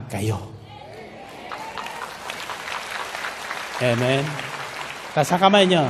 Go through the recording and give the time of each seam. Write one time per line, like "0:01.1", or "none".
none